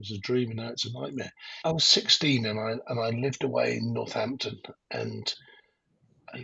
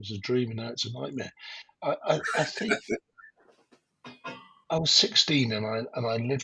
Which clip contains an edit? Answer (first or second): first